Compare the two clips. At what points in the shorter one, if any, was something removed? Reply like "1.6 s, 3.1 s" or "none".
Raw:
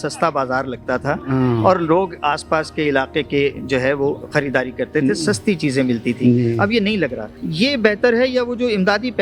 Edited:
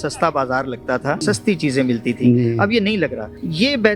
1.2 s